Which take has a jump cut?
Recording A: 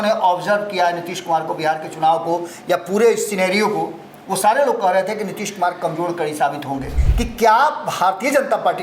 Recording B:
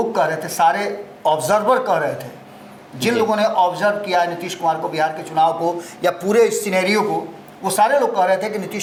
A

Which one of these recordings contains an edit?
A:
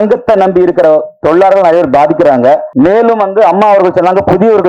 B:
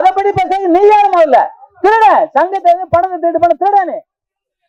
A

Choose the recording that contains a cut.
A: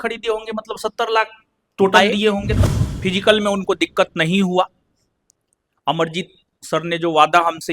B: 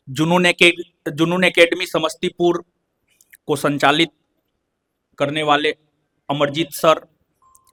A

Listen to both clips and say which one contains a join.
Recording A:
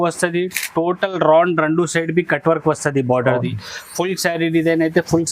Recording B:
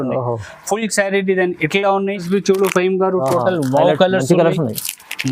B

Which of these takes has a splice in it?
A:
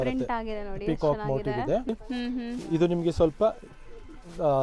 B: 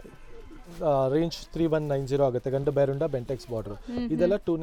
A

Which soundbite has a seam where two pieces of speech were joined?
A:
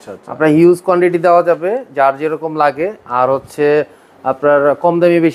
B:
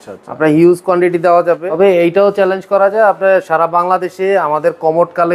B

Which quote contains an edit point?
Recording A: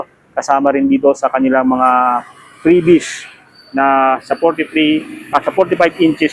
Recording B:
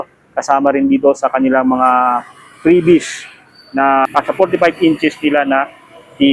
B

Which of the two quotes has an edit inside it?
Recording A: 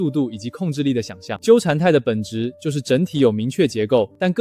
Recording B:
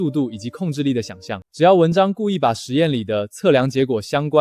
A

